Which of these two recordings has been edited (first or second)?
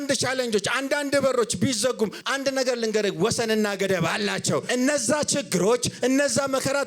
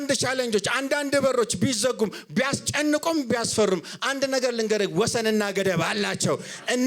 first